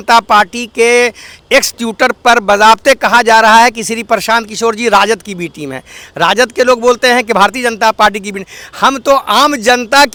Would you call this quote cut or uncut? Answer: uncut